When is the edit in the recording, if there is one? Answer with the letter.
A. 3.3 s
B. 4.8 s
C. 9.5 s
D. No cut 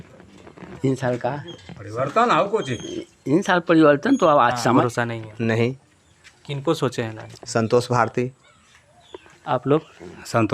B